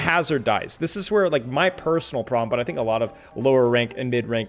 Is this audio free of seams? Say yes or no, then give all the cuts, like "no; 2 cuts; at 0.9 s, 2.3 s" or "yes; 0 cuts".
yes; 0 cuts